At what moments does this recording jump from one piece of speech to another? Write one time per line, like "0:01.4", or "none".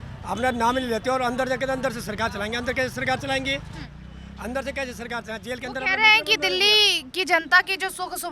none